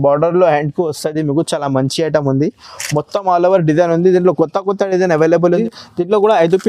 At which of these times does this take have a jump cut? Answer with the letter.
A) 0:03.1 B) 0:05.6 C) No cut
B